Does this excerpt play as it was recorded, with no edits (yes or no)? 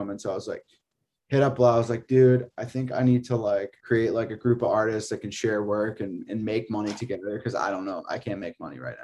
no